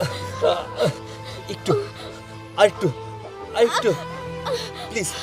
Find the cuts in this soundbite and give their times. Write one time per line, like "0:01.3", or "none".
none